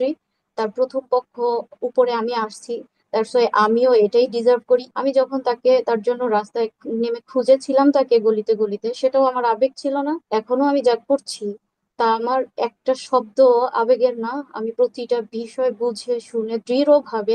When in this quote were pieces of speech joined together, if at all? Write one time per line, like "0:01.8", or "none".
0:04.9
0:10.2